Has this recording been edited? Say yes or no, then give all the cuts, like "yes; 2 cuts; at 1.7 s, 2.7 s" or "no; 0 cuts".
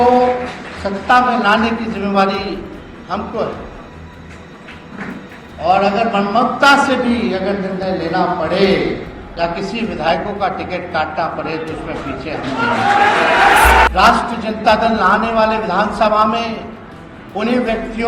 yes; 1 cut; at 13.9 s